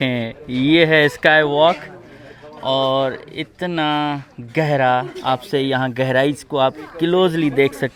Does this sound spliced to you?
no; 0 cuts

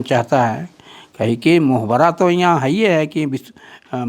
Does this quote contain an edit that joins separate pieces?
no; 0 cuts

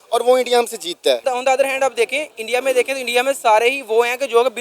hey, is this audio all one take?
no; 1 cut; at 1.2 s

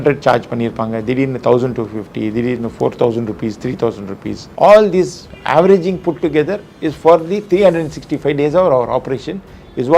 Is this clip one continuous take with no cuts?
no; 1 cut; at 4.4 s

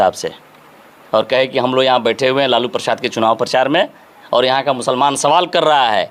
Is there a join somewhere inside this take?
no; 0 cuts

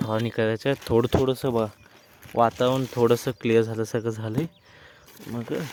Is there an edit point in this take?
no; 0 cuts

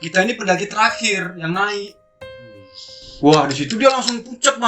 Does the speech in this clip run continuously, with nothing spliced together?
yes; 0 cuts

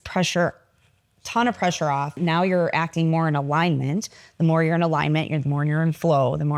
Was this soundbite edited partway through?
yes; 1 cut; at 2.2 s

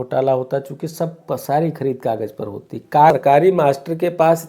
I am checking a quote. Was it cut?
yes; 1 cut; at 3.1 s

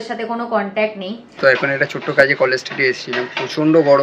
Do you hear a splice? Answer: yes; 1 cut; at 1.2 s

